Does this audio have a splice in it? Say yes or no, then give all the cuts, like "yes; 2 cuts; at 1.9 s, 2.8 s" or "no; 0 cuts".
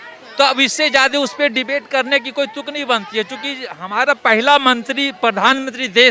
no; 0 cuts